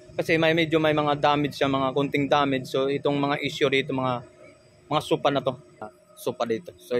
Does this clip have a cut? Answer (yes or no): yes